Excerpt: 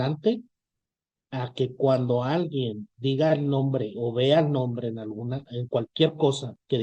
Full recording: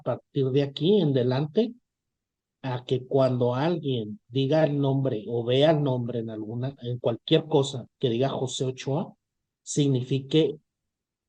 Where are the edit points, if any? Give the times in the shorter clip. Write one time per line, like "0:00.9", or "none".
none